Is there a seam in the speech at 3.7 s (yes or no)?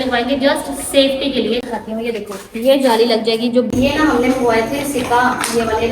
yes